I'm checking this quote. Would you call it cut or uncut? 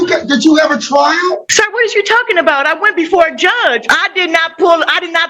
cut